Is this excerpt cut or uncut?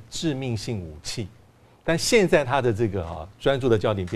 uncut